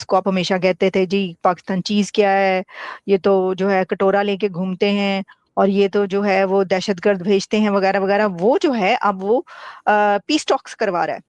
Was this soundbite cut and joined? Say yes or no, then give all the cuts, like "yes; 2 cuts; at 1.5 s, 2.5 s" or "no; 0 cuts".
no; 0 cuts